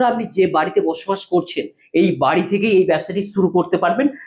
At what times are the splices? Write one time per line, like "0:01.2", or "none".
none

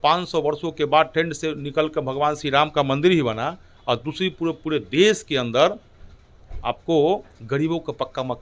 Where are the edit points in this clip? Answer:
none

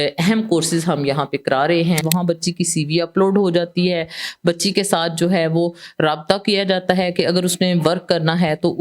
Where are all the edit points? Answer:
0:02.1

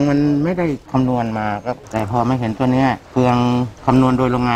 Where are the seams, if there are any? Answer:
0:01.8

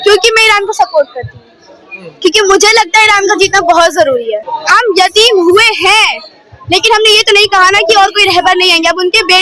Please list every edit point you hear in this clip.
0:04.5

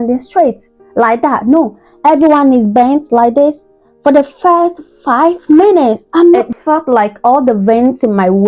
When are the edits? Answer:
0:06.5

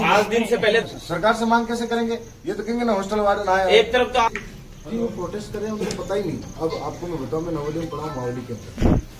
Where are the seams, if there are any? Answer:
0:00.8
0:04.3

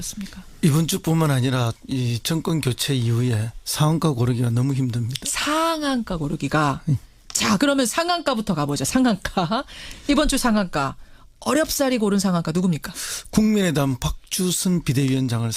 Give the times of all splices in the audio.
0:13.5

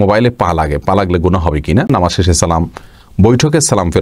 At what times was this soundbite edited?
0:01.9

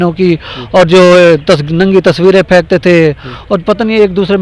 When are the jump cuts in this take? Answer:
none

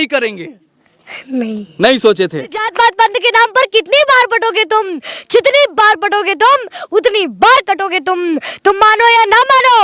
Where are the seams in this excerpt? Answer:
0:02.7

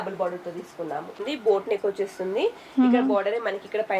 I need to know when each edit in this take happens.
0:01.2

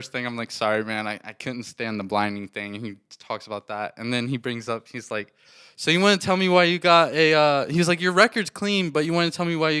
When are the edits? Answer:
none

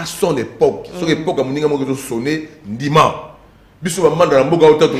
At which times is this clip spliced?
none

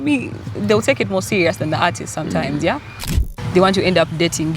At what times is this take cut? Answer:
0:03.2

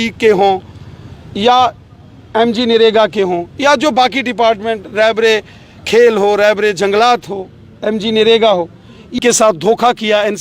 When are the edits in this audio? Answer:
0:09.2

